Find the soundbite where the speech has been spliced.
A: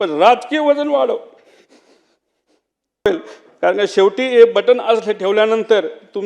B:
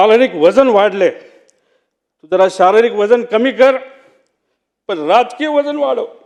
A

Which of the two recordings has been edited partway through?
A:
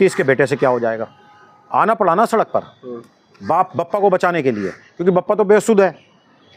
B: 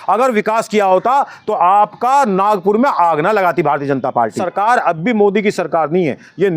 B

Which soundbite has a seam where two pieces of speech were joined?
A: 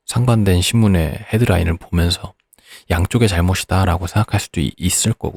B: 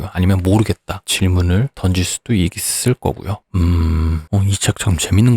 B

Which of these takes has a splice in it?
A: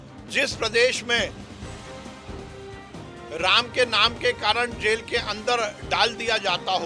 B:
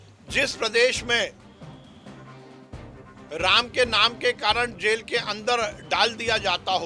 A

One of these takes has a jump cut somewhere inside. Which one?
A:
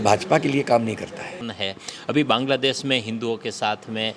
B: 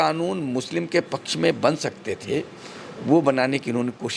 A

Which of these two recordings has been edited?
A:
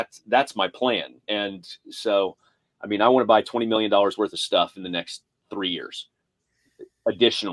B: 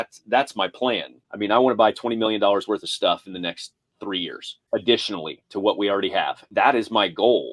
B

